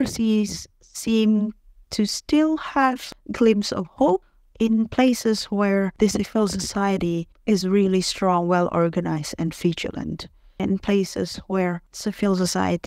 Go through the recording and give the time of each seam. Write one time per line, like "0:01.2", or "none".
0:03.1
0:04.4
0:05.9
0:10.6
0:11.9